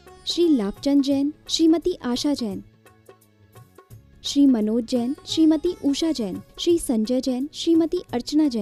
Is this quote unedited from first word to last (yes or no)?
yes